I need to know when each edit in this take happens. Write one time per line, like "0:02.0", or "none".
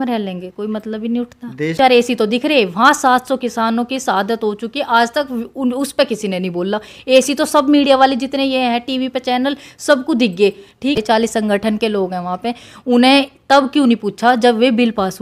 0:01.8
0:11.0